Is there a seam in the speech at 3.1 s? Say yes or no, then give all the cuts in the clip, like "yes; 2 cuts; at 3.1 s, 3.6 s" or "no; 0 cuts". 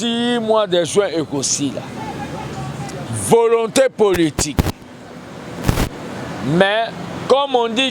yes; 1 cut; at 3.1 s